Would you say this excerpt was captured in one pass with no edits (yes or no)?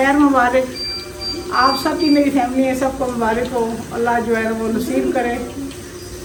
yes